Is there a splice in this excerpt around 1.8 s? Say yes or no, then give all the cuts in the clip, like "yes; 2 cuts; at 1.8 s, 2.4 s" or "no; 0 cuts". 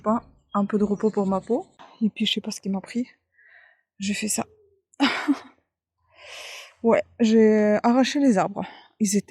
yes; 1 cut; at 1.8 s